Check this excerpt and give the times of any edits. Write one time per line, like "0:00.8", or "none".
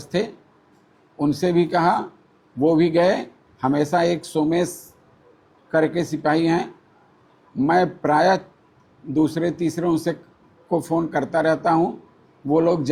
none